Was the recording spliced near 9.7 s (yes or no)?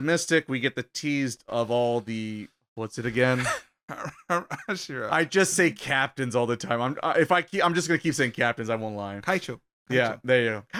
no